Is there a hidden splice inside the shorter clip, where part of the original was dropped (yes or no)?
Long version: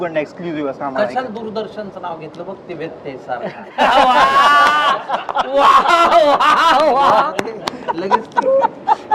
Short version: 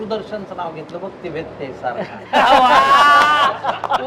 no